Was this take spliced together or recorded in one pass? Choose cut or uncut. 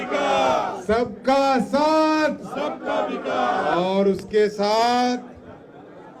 uncut